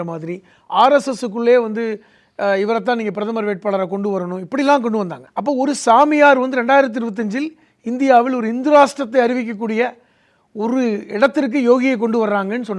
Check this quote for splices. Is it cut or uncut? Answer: cut